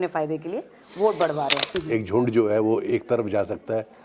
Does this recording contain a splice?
yes; 1 cut; at 1.7 s

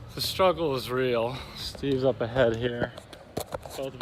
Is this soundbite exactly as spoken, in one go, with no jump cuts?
yes; 0 cuts

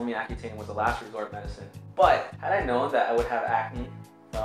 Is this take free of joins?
yes; 0 cuts

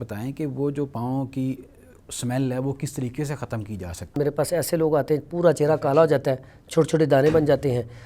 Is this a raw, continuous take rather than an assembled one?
no; 1 cut; at 4.1 s

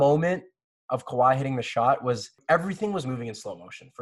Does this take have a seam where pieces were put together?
yes; 1 cut; at 2.4 s

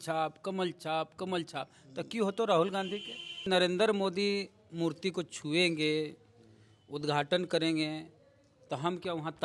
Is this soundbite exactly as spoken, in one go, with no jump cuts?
no; 1 cut; at 3.5 s

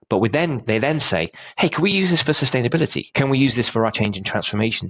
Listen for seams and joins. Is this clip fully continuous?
no; 2 cuts; at 3.0 s, 3.9 s

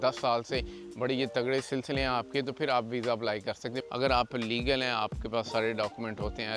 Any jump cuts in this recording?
yes; 1 cut; at 3.8 s

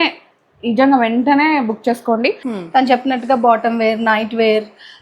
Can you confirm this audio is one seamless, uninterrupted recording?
no; 1 cut; at 2.5 s

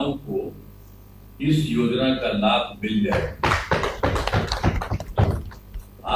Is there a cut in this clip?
no; 0 cuts

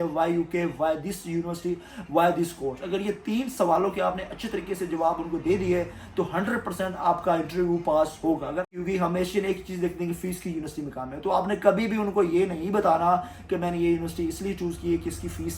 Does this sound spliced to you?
yes; 1 cut; at 8.6 s

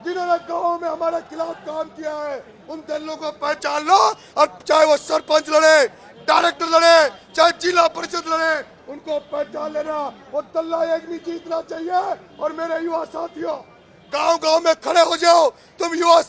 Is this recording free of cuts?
yes; 0 cuts

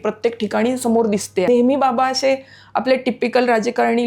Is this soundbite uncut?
no; 1 cut; at 1.5 s

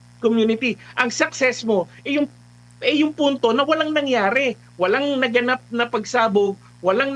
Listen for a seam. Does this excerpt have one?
no; 0 cuts

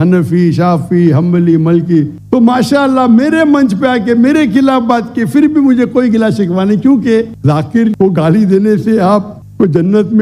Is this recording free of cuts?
no; 2 cuts; at 2.2 s, 7.3 s

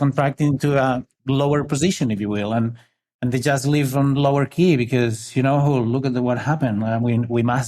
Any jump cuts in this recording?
yes; 1 cut; at 1.1 s

